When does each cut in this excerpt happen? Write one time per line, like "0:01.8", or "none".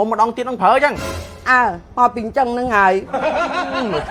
none